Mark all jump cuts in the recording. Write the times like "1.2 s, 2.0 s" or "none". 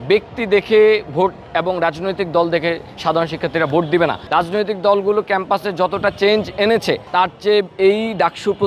4.2 s, 7.0 s